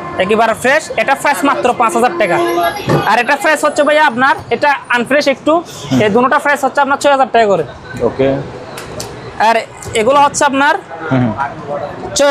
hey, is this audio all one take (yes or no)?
yes